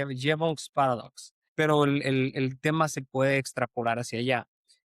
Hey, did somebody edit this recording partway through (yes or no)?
yes